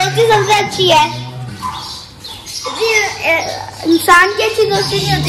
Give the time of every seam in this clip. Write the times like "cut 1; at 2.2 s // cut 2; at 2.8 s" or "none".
none